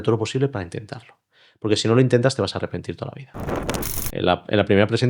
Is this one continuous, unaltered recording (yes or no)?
no